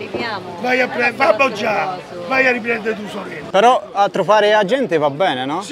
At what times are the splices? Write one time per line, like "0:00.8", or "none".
0:03.4